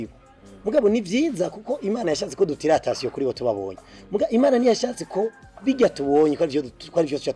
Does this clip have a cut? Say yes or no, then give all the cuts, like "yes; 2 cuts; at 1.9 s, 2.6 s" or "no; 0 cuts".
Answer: no; 0 cuts